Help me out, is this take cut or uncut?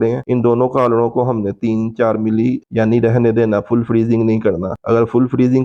uncut